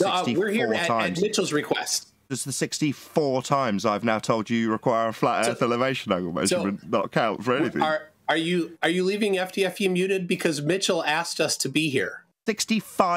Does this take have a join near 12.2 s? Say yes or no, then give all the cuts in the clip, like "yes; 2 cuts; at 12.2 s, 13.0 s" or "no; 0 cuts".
yes; 2 cuts; at 2.2 s, 12.2 s